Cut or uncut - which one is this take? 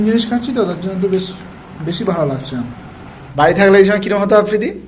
cut